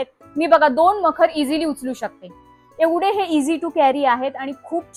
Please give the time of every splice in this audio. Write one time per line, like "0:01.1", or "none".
none